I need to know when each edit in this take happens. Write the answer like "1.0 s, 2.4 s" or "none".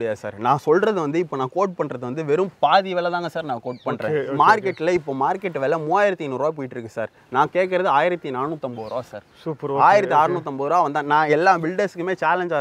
none